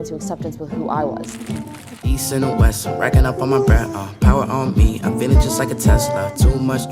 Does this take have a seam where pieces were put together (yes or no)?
yes